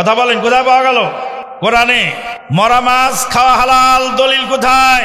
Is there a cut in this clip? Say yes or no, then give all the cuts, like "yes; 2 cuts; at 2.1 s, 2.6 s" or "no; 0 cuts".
yes; 2 cuts; at 1.4 s, 2.3 s